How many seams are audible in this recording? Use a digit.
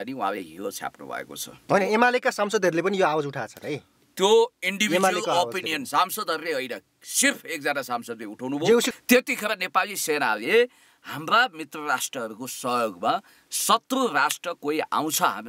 2